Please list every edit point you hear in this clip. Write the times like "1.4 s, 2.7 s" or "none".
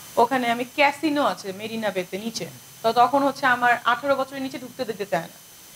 none